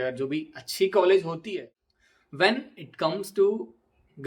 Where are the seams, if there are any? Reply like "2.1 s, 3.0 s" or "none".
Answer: 1.4 s